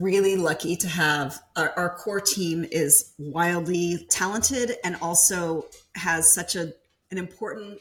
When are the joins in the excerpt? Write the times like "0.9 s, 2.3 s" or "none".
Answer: 4.1 s, 6.9 s